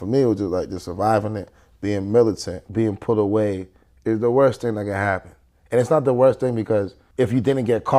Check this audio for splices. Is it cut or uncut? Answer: cut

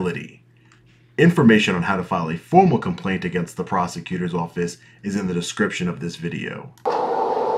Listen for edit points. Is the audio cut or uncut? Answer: uncut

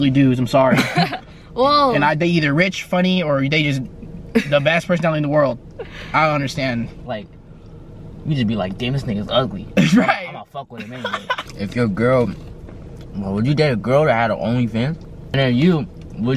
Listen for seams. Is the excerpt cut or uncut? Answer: cut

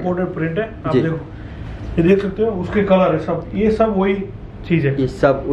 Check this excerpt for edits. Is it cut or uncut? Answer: uncut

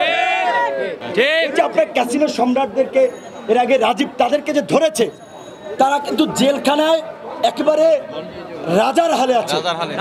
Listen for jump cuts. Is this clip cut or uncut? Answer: cut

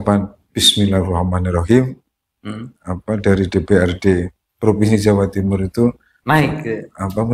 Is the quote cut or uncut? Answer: uncut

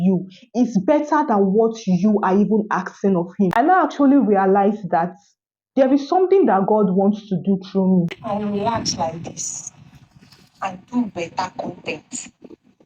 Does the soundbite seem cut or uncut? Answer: cut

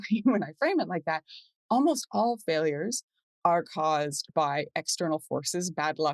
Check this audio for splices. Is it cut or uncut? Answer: uncut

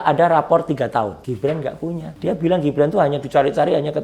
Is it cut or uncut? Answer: cut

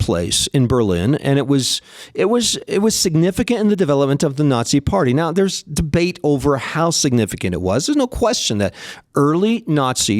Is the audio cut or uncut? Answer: uncut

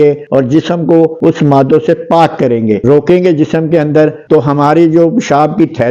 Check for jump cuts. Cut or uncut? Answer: cut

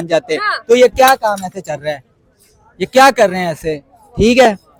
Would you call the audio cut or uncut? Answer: uncut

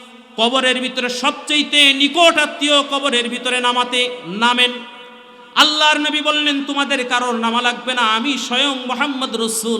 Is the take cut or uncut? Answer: uncut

